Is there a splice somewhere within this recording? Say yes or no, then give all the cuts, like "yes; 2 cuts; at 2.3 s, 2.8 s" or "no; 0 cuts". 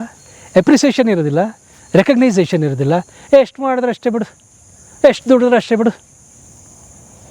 no; 0 cuts